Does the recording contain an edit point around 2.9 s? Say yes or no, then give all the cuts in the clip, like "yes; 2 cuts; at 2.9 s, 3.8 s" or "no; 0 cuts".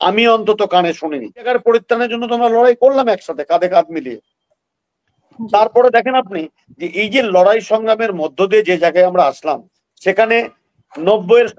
no; 1 cut; at 1.5 s